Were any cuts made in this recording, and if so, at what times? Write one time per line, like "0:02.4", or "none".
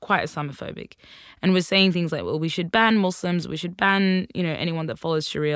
none